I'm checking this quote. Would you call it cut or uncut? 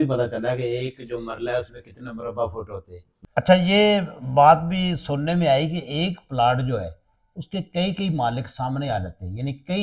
cut